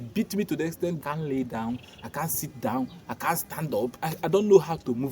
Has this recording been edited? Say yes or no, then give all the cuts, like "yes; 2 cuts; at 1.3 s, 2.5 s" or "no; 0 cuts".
yes; 2 cuts; at 1.0 s, 4.0 s